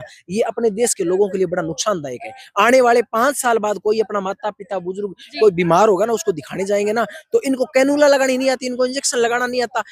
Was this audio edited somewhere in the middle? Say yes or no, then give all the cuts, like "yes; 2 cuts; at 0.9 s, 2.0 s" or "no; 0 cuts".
no; 0 cuts